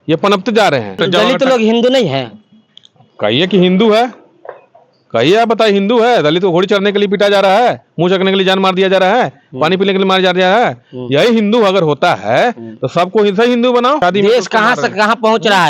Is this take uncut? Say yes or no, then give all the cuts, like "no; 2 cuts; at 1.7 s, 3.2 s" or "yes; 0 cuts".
no; 2 cuts; at 1.0 s, 14.0 s